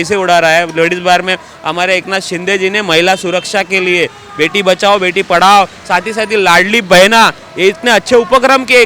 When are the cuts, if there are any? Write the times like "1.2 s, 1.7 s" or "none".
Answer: none